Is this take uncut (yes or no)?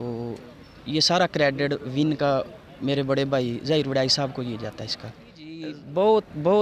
no